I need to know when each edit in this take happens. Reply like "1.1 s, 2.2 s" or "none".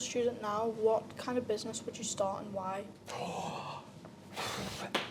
none

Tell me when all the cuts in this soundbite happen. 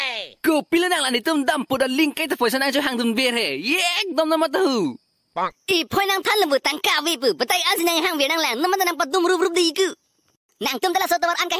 none

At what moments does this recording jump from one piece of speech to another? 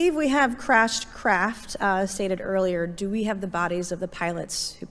none

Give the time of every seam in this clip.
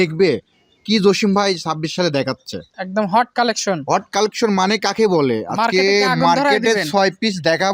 none

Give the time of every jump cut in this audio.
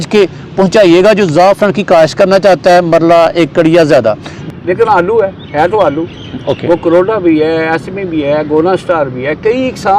4.3 s

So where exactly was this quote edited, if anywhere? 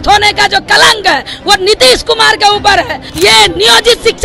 3.0 s

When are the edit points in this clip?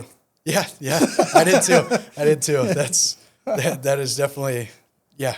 none

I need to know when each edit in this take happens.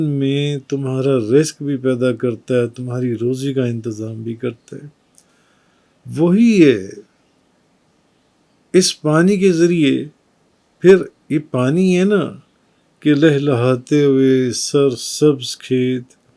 none

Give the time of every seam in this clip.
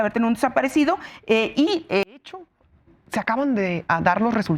2.2 s

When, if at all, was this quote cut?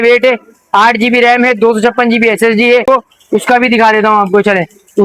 2.9 s

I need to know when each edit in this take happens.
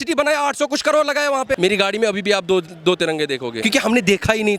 1.6 s, 3.6 s

